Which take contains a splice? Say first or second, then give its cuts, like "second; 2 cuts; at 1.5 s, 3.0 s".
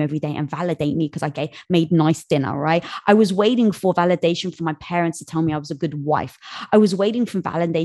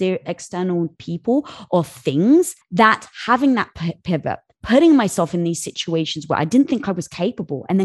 second; 1 cut; at 2.6 s